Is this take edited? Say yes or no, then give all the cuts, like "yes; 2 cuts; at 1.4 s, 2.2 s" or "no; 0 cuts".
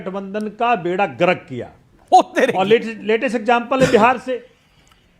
yes; 1 cut; at 2.0 s